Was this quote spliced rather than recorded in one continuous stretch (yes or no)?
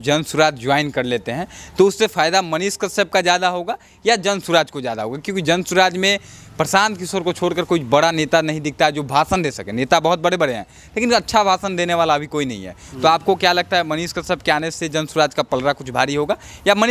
no